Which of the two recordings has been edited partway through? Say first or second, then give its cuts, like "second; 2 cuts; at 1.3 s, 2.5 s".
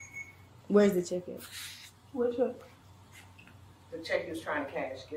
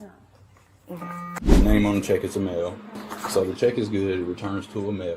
second; 1 cut; at 1.3 s